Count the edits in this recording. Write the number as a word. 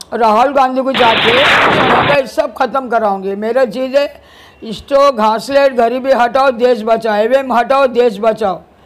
one